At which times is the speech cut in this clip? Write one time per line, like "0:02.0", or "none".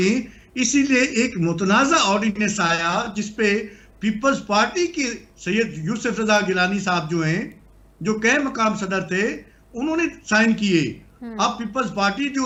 none